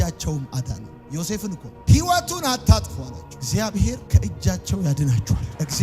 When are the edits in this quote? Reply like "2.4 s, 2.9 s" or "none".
1.7 s, 3.3 s